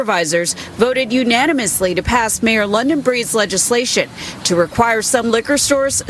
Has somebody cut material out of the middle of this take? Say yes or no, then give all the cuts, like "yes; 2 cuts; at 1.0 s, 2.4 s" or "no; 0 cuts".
no; 0 cuts